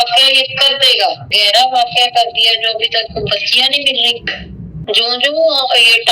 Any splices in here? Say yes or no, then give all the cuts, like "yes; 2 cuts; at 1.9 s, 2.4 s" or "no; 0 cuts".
yes; 2 cuts; at 1.4 s, 4.7 s